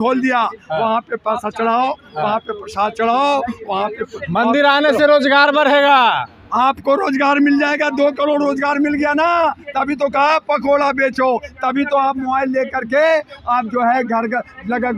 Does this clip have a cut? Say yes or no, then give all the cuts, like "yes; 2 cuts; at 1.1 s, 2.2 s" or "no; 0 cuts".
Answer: no; 0 cuts